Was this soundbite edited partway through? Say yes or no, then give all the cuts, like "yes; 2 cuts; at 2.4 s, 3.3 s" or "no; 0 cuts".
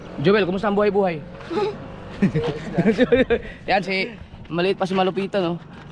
no; 0 cuts